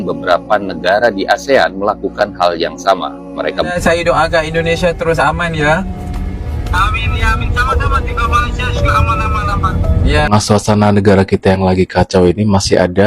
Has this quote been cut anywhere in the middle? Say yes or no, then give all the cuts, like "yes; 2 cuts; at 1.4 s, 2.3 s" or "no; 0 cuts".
yes; 2 cuts; at 3.7 s, 10.3 s